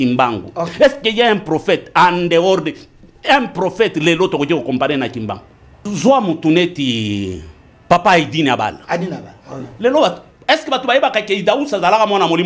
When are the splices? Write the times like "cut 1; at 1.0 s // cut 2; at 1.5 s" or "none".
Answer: cut 1; at 5.8 s